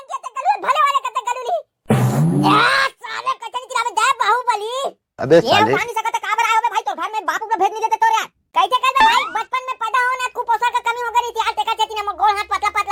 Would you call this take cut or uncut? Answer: uncut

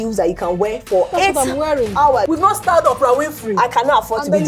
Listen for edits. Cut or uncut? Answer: cut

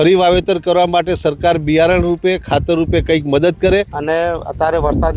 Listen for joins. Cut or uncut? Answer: cut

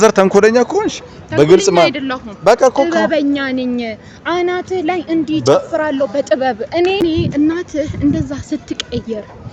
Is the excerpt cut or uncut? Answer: cut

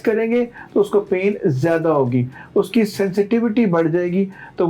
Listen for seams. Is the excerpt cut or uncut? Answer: uncut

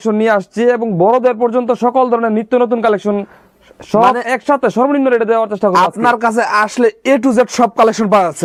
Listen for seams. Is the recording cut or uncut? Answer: uncut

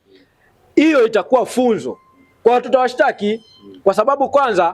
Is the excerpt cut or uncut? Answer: uncut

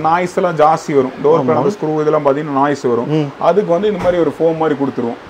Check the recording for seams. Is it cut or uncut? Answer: uncut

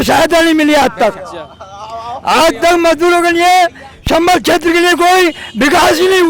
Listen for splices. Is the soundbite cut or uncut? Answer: uncut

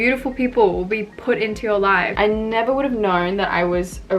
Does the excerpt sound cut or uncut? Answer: cut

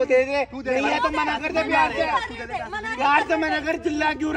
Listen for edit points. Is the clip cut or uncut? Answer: uncut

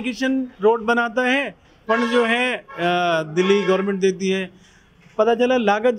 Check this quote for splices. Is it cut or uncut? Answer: uncut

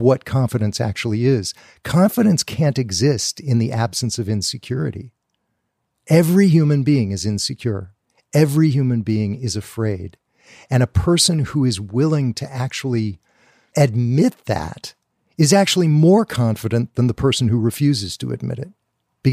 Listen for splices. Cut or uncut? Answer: uncut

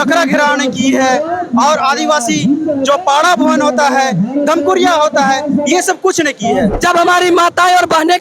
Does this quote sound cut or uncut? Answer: cut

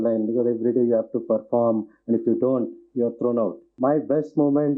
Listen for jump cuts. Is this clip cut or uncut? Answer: cut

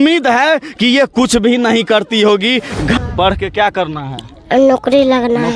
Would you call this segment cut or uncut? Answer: cut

